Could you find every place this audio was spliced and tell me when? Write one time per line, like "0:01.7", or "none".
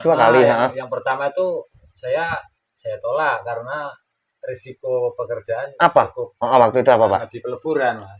none